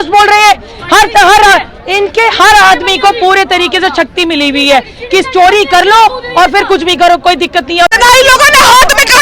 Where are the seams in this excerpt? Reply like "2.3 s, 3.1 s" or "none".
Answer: 7.9 s